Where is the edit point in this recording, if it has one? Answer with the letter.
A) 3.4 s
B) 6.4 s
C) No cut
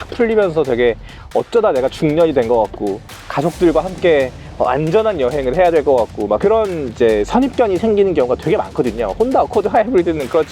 B